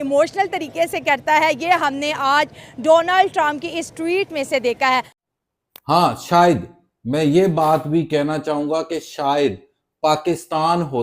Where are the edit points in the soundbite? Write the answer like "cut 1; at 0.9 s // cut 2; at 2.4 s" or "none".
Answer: cut 1; at 5.1 s